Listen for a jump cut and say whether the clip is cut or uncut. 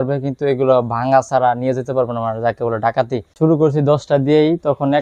cut